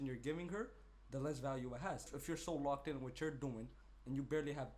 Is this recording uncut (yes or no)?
no